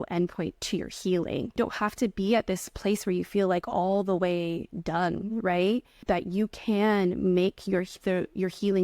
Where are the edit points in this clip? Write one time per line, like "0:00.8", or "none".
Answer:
0:01.6
0:05.9